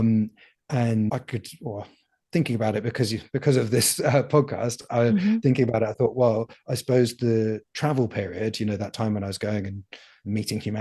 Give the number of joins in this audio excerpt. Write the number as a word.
zero